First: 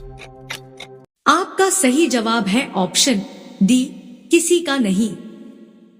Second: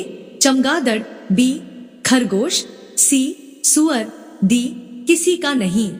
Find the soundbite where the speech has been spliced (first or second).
first